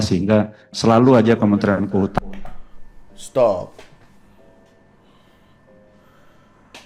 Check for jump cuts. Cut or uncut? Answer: uncut